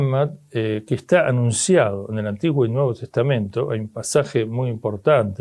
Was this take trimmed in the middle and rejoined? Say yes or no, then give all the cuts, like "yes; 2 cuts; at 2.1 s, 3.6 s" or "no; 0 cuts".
no; 0 cuts